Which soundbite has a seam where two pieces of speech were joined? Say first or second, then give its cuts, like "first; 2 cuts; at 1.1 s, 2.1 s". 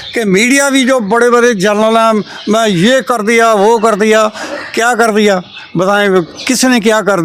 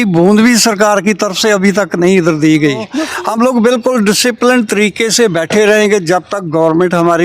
second; 1 cut; at 3.0 s